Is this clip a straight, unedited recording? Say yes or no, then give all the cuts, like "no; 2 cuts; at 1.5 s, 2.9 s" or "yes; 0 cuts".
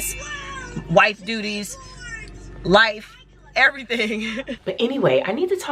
no; 1 cut; at 4.6 s